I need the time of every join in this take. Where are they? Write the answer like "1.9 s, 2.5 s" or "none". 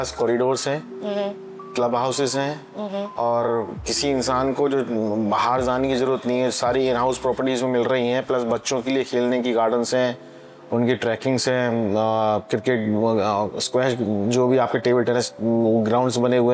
none